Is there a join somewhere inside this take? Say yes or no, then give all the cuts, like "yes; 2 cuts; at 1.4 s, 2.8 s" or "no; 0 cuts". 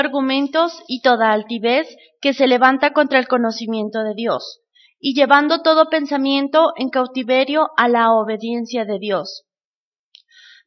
yes; 1 cut; at 1.6 s